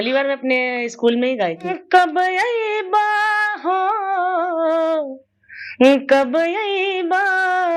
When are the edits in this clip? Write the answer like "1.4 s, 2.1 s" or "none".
1.7 s